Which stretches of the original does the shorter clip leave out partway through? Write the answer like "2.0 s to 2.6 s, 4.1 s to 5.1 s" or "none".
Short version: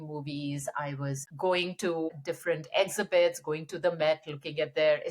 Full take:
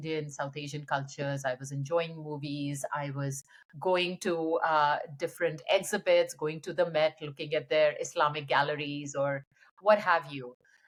3.4 s to 3.7 s, 4.5 s to 5.0 s